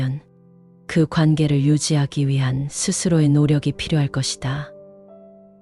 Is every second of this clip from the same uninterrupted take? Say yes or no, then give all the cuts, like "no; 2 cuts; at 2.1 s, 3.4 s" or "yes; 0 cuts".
no; 1 cut; at 4.6 s